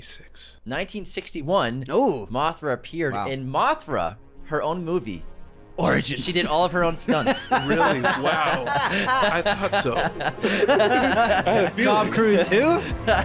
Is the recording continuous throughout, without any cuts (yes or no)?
yes